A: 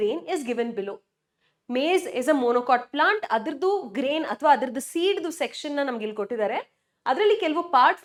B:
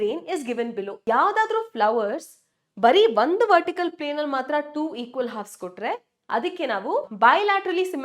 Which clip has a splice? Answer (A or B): B